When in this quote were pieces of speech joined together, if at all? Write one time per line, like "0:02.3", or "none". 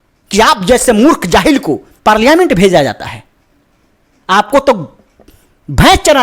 0:01.9

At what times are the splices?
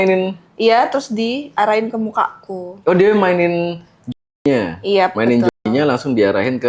none

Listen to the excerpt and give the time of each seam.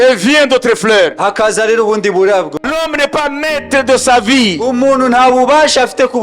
0:02.6

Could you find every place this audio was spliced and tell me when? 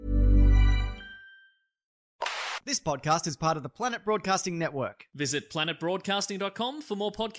0:02.4

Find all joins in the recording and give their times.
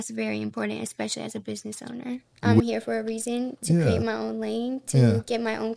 0:02.6

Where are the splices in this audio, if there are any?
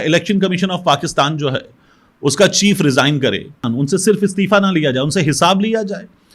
0:03.7

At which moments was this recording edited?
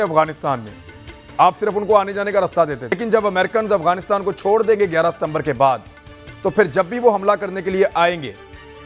0:03.0

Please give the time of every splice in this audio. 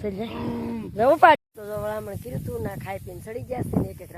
0:01.4

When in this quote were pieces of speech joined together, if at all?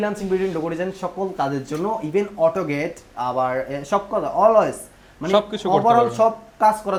none

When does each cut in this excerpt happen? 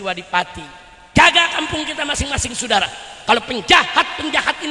0:01.1

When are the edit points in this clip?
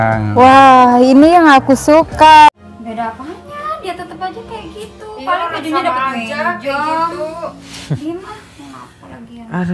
0:02.5

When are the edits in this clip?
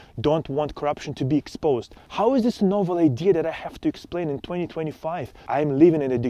0:02.0
0:05.4

